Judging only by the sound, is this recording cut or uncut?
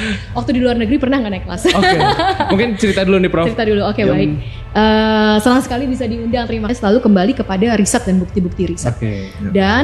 cut